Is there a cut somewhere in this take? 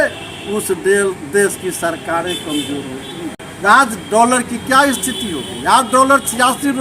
yes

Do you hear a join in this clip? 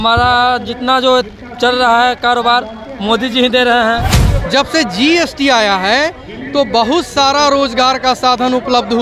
yes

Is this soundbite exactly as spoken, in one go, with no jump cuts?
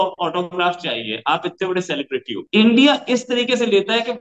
no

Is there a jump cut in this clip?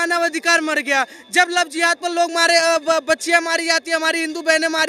no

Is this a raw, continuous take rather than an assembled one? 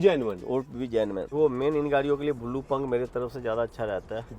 no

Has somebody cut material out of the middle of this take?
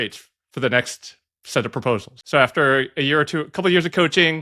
yes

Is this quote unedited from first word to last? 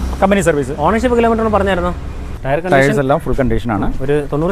no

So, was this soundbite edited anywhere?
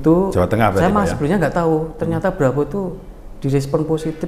no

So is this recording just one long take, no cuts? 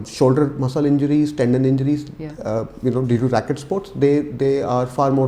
yes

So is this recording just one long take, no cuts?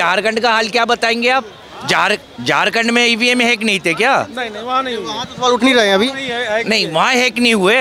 yes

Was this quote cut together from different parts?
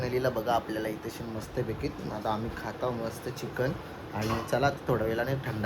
no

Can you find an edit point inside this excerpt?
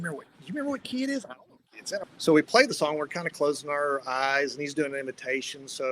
yes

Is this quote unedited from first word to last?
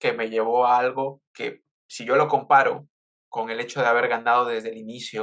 yes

